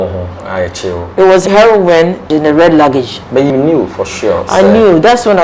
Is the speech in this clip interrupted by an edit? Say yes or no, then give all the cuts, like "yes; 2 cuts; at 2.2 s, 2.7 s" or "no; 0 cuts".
yes; 3 cuts; at 1.4 s, 2.3 s, 3.5 s